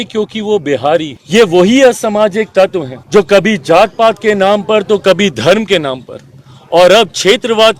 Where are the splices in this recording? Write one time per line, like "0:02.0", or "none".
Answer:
0:01.2
0:02.9